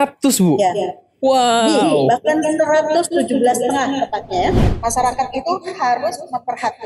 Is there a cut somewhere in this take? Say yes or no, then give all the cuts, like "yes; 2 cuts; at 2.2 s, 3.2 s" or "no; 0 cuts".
yes; 1 cut; at 4.7 s